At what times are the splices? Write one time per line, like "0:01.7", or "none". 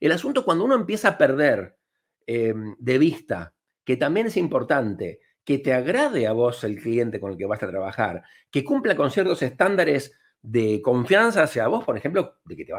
none